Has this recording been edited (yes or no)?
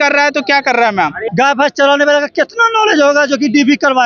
yes